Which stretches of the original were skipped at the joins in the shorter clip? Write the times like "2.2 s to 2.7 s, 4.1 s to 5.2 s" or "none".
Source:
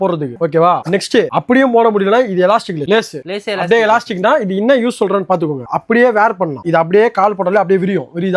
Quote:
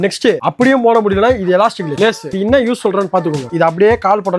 3.2 s to 4.5 s, 5.6 s to 6.6 s